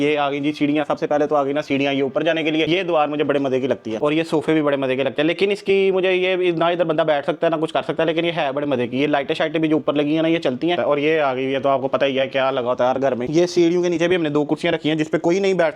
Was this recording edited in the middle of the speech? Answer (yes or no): no